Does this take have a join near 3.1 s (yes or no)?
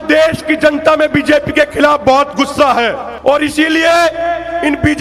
yes